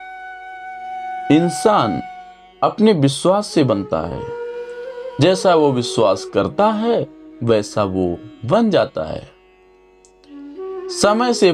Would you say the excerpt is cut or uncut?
uncut